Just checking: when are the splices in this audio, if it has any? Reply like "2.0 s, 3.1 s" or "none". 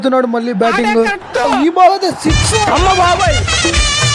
1.5 s